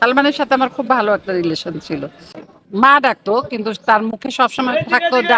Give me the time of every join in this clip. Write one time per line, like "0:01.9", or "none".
0:02.4